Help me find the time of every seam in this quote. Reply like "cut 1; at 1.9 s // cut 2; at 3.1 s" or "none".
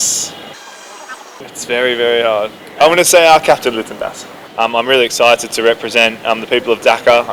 cut 1; at 1.0 s // cut 2; at 4.4 s

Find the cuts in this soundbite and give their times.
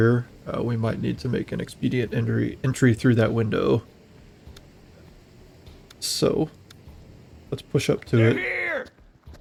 none

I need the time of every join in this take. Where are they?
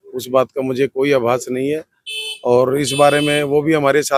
none

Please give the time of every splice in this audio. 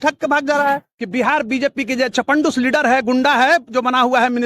cut 1; at 1.0 s

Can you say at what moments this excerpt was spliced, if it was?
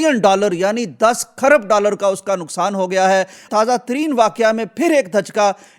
none

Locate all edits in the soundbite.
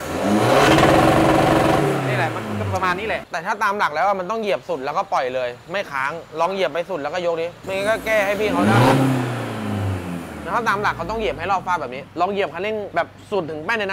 cut 1; at 3.2 s // cut 2; at 7.6 s // cut 3; at 12.0 s // cut 4; at 12.9 s

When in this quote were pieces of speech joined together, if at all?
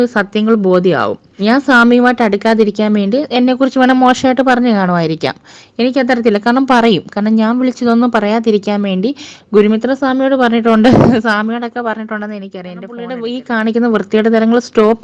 cut 1; at 1.2 s // cut 2; at 13.1 s

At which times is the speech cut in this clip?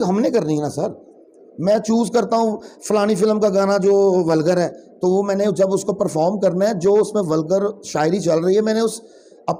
none

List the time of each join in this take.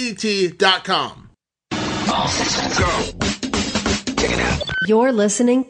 cut 1; at 1.7 s

